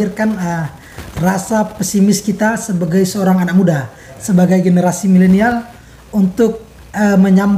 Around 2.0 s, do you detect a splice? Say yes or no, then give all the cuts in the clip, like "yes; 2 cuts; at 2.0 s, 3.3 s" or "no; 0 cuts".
no; 0 cuts